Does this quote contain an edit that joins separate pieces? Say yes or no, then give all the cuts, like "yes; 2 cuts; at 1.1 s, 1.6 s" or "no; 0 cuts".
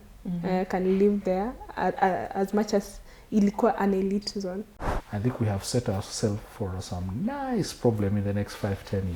yes; 1 cut; at 4.9 s